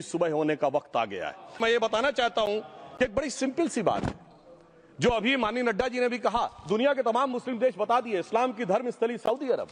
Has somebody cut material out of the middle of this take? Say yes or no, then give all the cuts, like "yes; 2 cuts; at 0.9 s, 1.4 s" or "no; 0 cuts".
yes; 1 cut; at 1.6 s